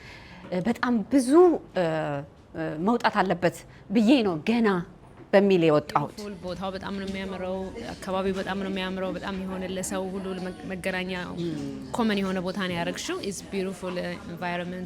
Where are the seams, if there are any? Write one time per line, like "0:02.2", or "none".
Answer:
0:06.3